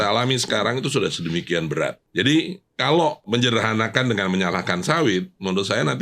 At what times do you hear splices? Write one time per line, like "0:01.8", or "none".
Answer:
0:02.0
0:03.2